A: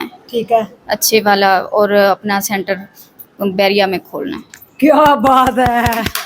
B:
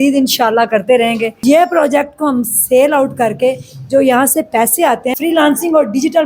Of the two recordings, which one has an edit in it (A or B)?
B